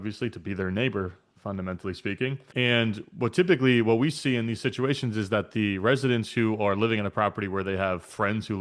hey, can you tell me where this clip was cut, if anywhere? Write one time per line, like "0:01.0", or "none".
0:02.4